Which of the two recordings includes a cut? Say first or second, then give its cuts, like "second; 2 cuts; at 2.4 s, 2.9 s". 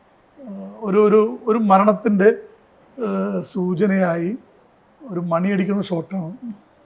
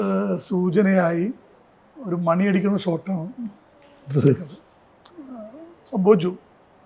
second; 1 cut; at 5.1 s